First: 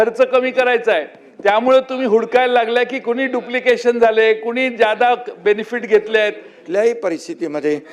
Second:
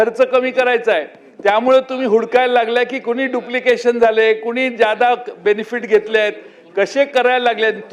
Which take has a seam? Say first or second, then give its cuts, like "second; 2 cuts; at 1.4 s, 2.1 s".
first; 1 cut; at 6.6 s